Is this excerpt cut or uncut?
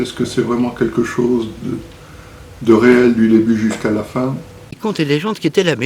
cut